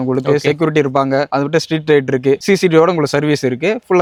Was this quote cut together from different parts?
no; 0 cuts

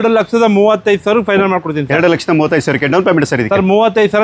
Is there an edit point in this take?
no; 0 cuts

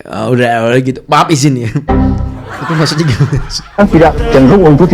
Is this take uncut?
no; 1 cut; at 3.8 s

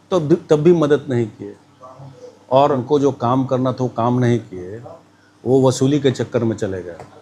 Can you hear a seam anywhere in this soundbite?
yes; 1 cut; at 2.8 s

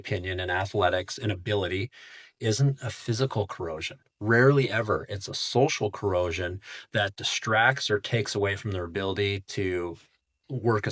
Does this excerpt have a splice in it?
no; 0 cuts

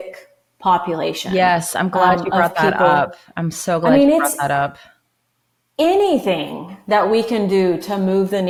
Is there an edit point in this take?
no; 0 cuts

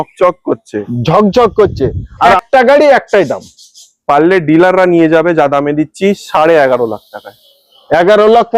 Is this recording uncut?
no; 1 cut; at 2.4 s

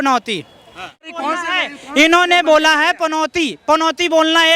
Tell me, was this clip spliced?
yes; 1 cut; at 1.0 s

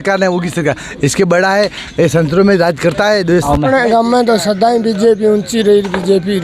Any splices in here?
yes; 1 cut; at 3.5 s

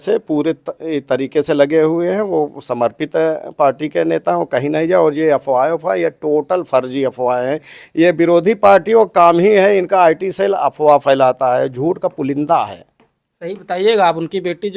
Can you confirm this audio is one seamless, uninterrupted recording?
yes; 0 cuts

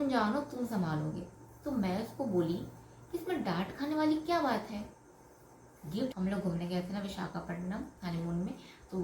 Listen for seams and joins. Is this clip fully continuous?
no; 1 cut; at 6.1 s

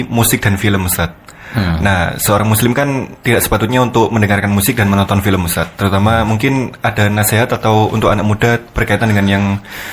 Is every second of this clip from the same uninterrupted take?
yes; 0 cuts

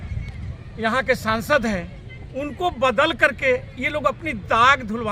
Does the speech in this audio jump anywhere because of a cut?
no; 0 cuts

